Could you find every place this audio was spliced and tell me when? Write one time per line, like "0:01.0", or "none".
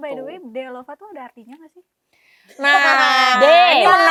none

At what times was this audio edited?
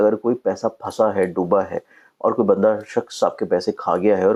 none

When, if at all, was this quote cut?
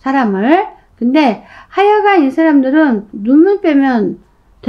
0:03.1

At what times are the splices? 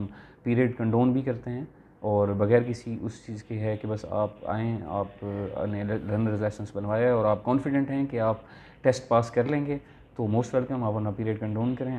none

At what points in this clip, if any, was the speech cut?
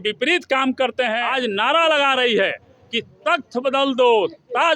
0:01.2

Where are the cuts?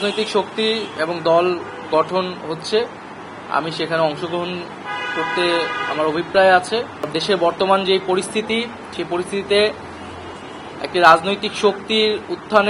0:07.1

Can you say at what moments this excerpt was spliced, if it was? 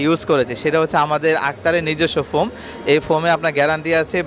none

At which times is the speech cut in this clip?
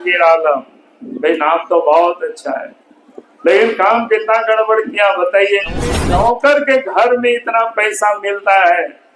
0:06.0

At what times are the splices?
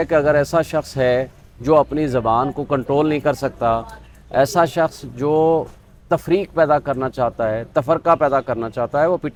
none

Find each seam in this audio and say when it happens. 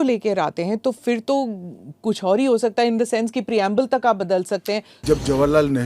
0:04.9

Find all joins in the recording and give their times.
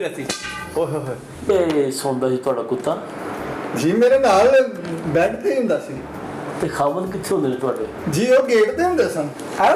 0:01.5

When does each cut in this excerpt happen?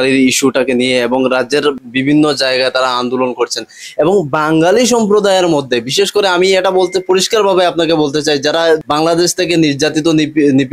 0:01.8
0:08.8

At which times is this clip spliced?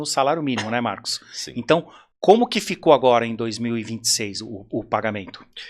none

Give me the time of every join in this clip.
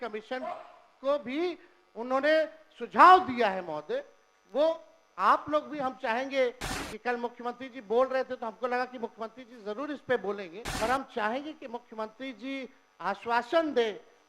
0:10.6

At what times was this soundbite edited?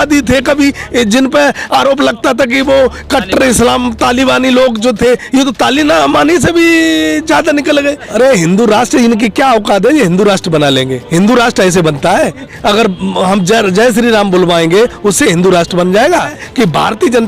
0:08.0
0:12.5
0:16.4

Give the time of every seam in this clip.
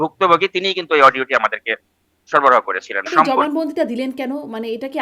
0:03.1

